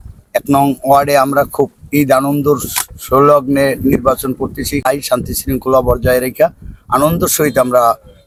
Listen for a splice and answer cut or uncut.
uncut